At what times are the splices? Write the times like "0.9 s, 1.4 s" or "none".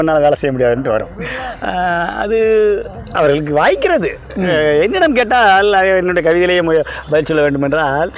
none